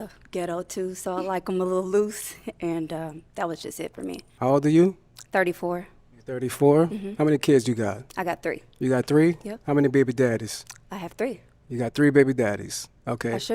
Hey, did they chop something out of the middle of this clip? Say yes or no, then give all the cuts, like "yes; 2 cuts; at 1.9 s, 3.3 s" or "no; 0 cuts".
yes; 1 cut; at 4.3 s